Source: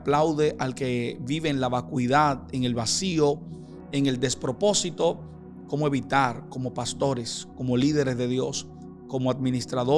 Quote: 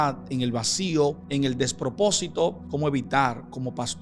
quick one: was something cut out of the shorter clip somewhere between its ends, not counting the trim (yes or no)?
yes